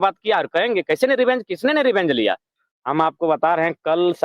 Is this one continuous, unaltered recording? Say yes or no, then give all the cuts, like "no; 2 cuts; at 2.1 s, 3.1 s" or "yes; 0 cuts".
no; 1 cut; at 2.5 s